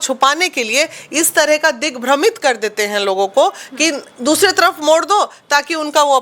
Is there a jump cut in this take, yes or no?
no